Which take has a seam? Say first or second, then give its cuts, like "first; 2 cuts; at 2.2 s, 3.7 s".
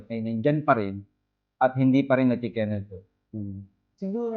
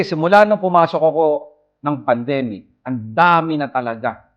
first; 1 cut; at 3.3 s